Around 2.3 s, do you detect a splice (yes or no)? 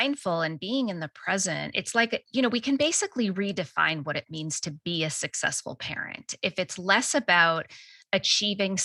yes